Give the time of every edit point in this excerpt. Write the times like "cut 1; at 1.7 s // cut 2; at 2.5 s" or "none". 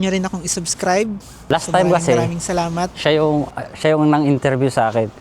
cut 1; at 1.4 s